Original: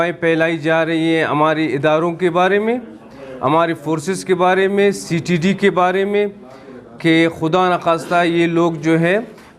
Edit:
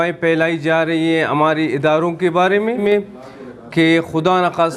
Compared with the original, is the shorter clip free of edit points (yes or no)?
no